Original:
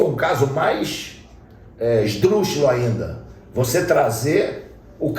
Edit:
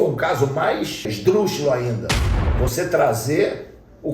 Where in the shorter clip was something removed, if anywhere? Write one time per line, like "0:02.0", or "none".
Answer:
0:01.1